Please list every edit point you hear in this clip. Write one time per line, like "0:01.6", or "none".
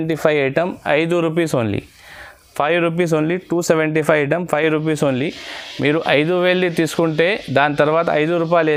none